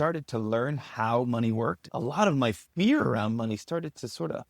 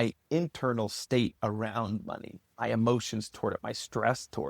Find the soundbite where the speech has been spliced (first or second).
first